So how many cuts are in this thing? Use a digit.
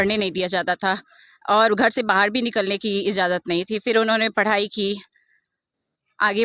0